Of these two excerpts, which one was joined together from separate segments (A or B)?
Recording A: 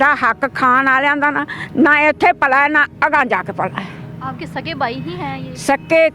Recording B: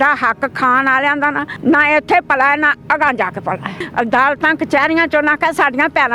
B